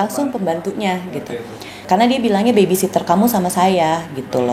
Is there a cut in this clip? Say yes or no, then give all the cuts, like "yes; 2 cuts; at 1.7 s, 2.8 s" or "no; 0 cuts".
yes; 1 cut; at 1.8 s